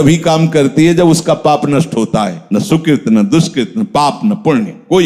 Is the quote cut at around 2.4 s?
yes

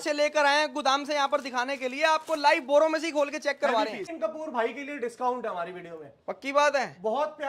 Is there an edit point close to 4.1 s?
yes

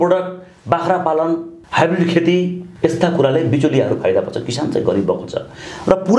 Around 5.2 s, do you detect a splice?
no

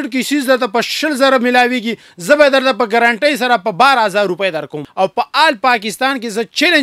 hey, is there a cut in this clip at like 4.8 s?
yes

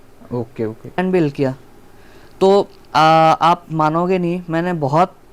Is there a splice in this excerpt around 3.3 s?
no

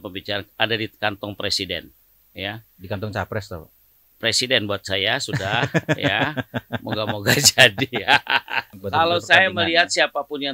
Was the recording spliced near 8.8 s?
yes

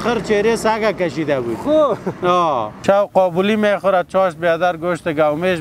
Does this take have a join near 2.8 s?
yes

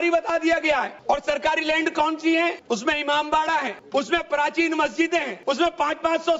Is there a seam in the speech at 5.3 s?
yes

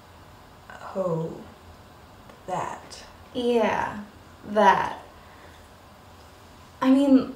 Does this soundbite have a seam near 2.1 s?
yes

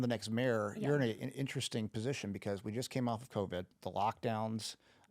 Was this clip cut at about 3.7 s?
yes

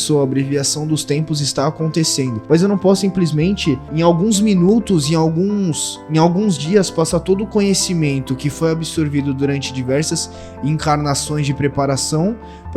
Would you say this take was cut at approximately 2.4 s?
yes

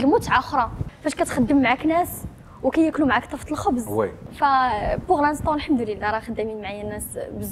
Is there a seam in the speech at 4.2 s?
yes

